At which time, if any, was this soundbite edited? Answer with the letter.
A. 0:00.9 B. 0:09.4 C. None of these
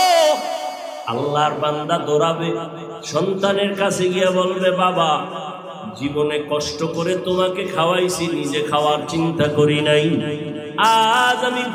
A